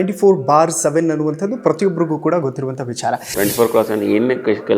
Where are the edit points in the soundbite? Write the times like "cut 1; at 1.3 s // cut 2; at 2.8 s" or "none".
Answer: cut 1; at 3.3 s